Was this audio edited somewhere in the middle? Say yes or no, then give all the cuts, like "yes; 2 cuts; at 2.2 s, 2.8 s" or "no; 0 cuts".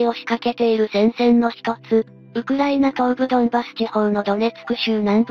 no; 0 cuts